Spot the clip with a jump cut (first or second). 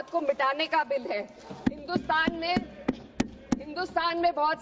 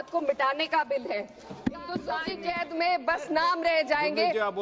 second